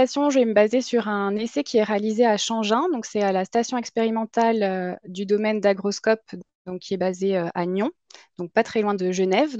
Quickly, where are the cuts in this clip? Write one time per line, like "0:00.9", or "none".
none